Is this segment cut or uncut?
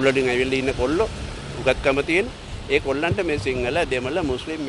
uncut